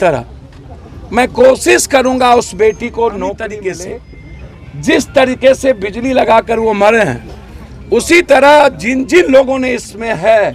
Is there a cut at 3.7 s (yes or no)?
yes